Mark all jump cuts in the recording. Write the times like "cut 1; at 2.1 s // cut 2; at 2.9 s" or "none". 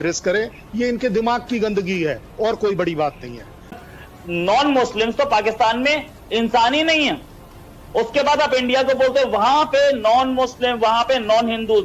cut 1; at 3.8 s